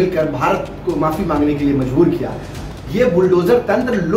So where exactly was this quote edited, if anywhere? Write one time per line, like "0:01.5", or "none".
0:02.6